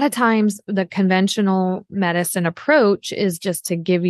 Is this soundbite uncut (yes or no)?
yes